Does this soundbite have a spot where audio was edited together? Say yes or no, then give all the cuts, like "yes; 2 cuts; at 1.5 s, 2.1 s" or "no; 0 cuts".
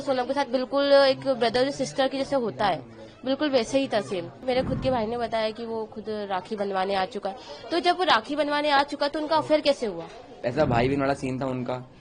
yes; 2 cuts; at 4.4 s, 10.4 s